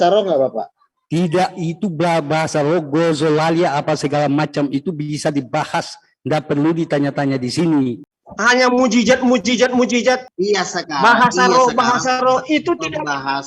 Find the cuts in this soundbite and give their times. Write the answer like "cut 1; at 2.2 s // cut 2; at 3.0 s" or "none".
cut 1; at 8.2 s // cut 2; at 10.3 s